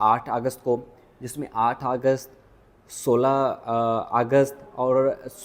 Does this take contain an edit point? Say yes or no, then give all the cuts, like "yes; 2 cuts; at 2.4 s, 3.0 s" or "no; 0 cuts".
no; 0 cuts